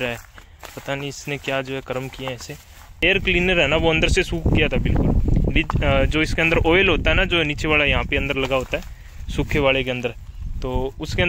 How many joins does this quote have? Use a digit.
1